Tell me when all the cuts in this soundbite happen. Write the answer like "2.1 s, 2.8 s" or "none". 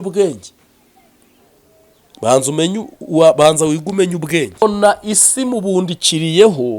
4.6 s